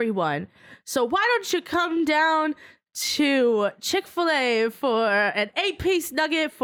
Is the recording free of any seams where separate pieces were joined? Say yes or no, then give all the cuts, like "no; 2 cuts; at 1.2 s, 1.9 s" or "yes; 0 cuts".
yes; 0 cuts